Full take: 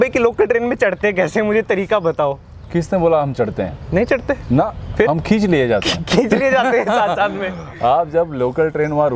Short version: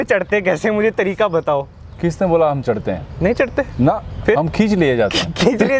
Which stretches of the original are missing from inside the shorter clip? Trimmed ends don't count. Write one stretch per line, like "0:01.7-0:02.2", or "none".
none